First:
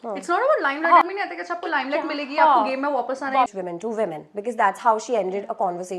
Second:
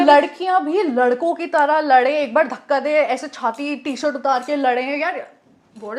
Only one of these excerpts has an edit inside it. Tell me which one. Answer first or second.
first